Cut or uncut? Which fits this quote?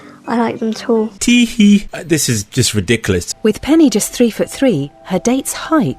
cut